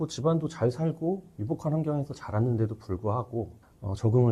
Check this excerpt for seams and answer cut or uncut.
uncut